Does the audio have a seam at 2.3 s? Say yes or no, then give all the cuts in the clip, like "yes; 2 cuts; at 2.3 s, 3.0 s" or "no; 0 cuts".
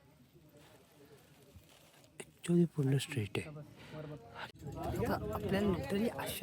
no; 1 cut; at 4.5 s